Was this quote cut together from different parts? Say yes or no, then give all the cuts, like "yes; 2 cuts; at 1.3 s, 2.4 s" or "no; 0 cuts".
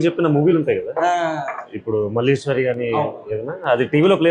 no; 0 cuts